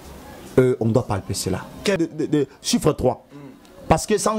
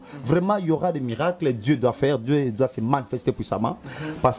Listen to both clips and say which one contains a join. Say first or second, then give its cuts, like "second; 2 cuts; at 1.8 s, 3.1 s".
first; 1 cut; at 2.0 s